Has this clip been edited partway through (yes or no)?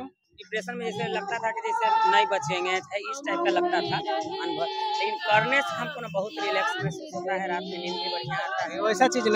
no